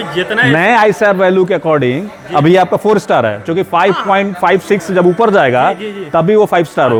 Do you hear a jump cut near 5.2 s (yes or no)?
no